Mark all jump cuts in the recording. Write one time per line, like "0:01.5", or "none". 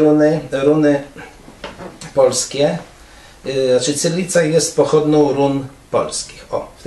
0:02.8